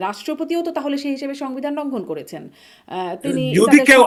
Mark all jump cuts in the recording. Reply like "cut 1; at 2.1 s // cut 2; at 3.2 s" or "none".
none